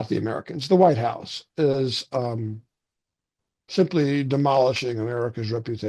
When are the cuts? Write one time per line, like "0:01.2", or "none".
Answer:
none